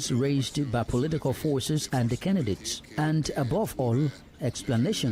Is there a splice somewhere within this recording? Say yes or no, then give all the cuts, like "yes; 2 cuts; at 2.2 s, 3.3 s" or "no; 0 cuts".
no; 0 cuts